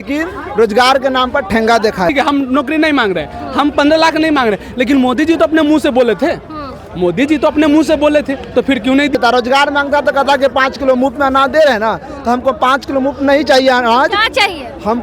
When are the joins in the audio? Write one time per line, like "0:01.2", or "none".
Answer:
0:02.1
0:09.1